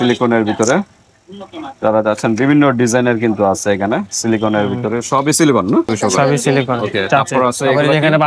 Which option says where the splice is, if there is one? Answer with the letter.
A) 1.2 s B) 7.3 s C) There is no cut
B